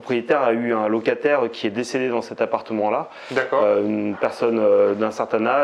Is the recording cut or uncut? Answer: uncut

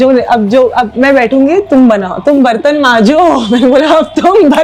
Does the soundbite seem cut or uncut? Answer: uncut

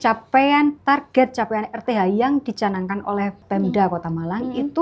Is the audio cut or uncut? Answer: cut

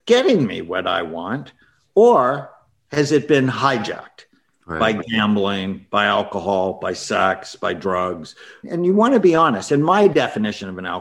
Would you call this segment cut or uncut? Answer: uncut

